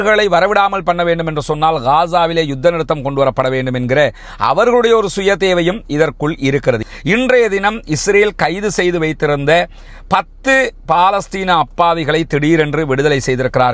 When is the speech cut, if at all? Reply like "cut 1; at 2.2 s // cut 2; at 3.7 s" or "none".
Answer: cut 1; at 6.8 s

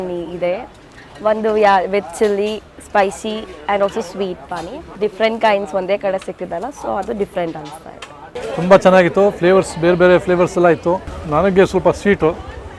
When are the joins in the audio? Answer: cut 1; at 4.9 s // cut 2; at 11.1 s

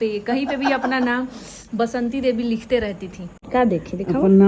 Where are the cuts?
cut 1; at 3.4 s

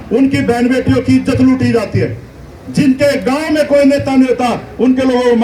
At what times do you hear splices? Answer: none

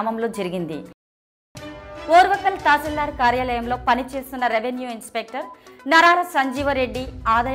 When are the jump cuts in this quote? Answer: cut 1; at 1.2 s

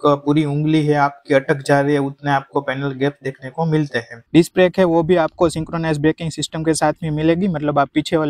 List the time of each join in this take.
cut 1; at 4.3 s

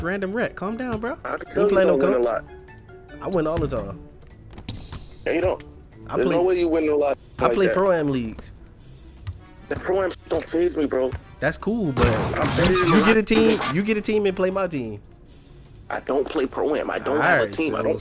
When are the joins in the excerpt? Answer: cut 1; at 1.4 s

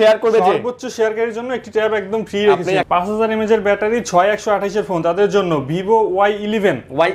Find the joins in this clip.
cut 1; at 2.8 s

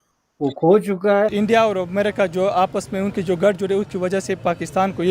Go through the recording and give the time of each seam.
cut 1; at 1.3 s

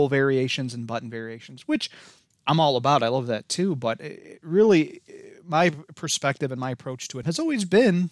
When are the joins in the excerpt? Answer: cut 1; at 7.2 s

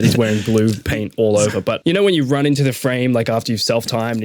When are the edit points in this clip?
cut 1; at 1.8 s

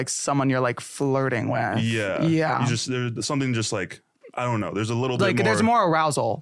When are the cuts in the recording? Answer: none

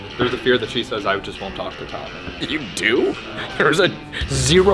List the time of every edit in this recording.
cut 1; at 2.2 s

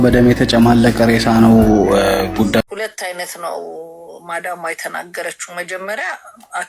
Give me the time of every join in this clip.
cut 1; at 0.9 s // cut 2; at 2.6 s

